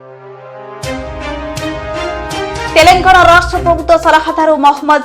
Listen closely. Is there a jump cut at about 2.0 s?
yes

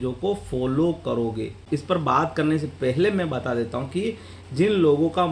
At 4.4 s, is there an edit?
no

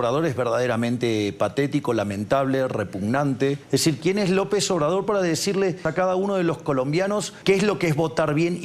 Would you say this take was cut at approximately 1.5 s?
no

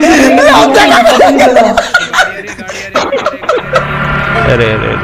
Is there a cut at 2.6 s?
no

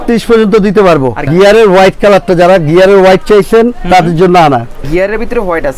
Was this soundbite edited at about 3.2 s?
no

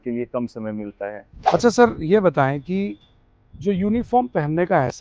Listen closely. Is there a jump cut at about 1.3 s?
yes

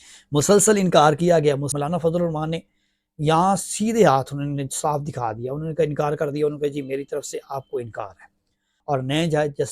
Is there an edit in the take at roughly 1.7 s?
yes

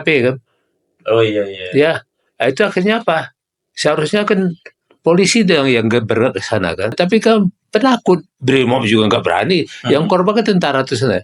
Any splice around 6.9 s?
yes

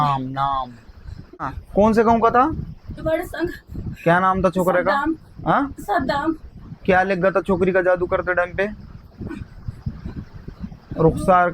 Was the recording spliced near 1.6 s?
yes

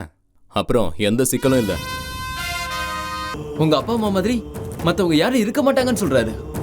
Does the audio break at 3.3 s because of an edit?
yes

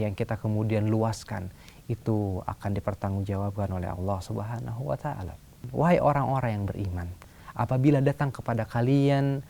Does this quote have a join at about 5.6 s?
yes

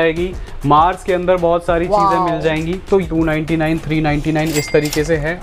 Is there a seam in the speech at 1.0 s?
no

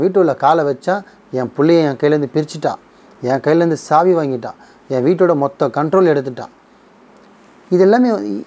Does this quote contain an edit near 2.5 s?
no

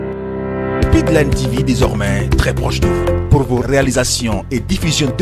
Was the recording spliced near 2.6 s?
no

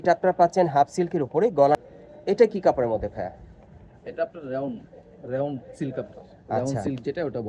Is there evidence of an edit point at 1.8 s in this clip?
yes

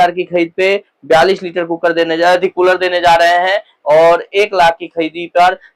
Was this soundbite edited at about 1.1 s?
no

